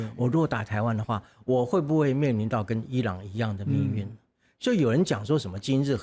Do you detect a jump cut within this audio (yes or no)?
no